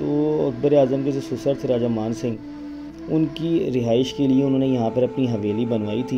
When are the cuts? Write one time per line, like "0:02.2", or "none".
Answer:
none

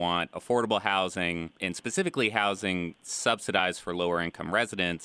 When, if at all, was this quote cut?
0:01.6

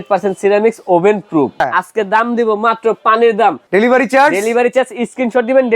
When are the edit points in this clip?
0:01.7
0:03.6

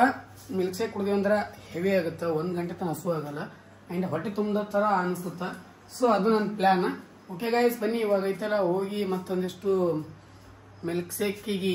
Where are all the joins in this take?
none

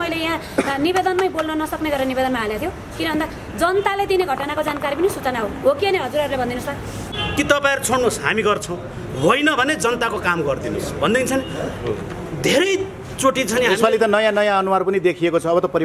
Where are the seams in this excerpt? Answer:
0:07.0

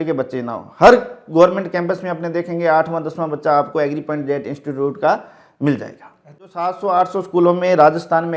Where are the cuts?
0:06.7

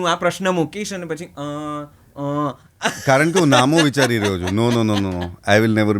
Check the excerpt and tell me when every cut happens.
none

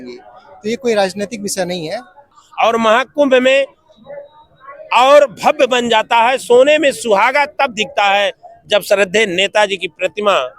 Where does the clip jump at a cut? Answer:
0:02.4

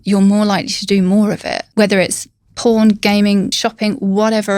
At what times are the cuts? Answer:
0:01.6
0:03.5

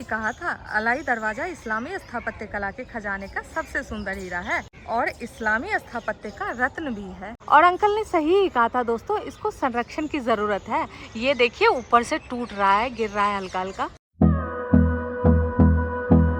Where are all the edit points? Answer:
none

